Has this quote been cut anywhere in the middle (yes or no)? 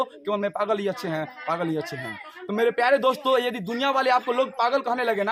no